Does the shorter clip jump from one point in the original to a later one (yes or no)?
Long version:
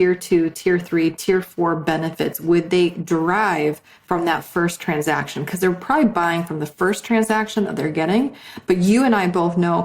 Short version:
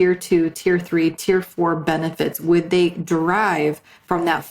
no